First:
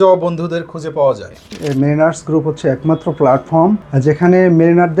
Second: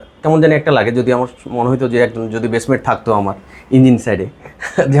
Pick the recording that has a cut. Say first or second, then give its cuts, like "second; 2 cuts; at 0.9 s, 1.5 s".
first; 2 cuts; at 1.6 s, 3.9 s